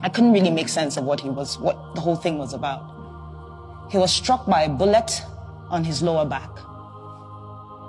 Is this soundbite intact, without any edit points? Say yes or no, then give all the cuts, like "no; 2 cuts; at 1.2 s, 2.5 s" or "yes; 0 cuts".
no; 1 cut; at 6.8 s